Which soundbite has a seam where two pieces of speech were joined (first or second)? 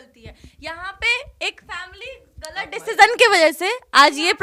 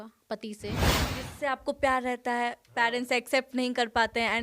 second